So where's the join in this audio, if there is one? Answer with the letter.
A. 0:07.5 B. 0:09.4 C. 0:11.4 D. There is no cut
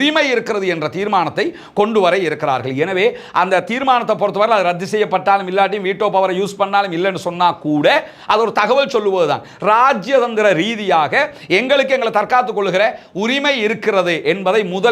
D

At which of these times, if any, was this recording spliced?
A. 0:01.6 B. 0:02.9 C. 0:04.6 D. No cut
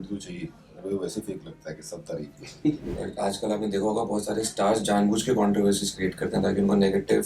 B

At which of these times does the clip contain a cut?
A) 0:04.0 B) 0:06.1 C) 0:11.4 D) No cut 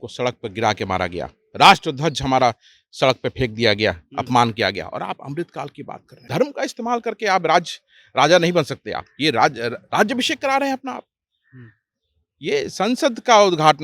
B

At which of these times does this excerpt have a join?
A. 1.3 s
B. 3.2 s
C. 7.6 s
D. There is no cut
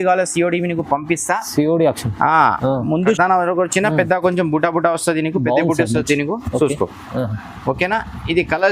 B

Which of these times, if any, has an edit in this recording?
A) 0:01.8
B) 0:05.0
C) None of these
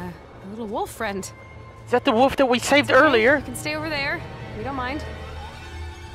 C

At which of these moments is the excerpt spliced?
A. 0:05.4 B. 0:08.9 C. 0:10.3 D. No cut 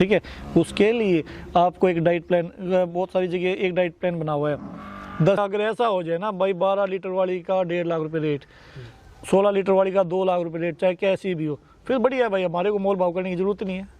A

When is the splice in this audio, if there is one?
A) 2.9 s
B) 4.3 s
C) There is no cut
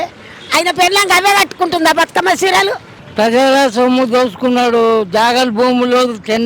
A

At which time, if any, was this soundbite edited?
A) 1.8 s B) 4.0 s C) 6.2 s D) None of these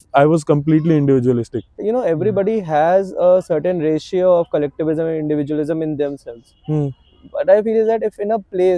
A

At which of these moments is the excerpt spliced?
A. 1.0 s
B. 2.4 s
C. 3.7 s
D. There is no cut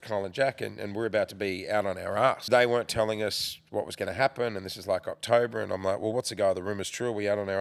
B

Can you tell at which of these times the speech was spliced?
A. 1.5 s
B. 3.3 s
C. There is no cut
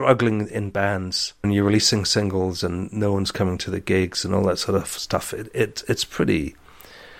A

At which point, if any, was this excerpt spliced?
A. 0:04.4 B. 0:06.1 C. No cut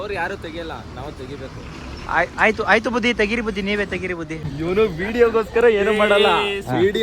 A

